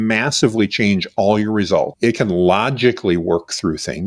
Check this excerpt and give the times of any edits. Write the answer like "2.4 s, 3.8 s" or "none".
1.9 s